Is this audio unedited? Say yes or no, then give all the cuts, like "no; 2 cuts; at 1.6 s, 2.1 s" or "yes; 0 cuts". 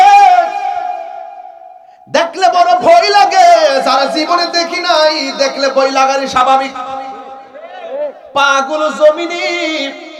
yes; 0 cuts